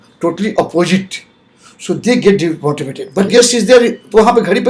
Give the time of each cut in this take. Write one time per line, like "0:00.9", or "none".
0:03.3